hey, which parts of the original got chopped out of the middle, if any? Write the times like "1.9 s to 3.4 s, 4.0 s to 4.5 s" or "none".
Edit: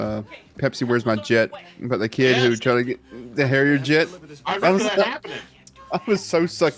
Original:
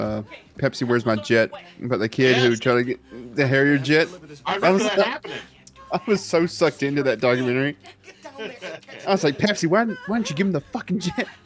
none